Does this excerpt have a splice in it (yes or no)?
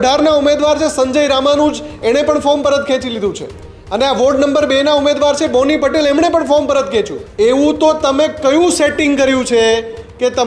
yes